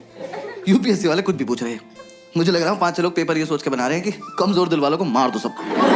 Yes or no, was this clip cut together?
no